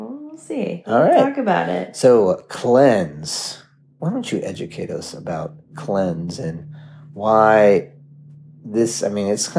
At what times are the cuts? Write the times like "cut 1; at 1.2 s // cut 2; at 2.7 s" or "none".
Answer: none